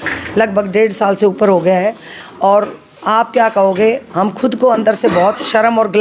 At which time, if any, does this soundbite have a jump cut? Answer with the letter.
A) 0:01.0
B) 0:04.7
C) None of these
C